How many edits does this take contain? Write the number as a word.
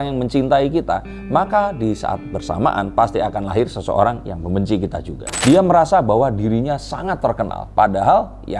one